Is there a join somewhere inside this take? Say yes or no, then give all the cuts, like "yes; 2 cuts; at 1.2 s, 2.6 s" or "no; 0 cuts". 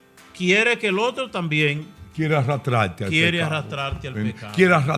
no; 0 cuts